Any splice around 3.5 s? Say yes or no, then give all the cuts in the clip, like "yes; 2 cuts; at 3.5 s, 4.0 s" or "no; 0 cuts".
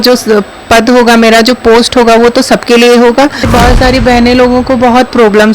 yes; 1 cut; at 3.5 s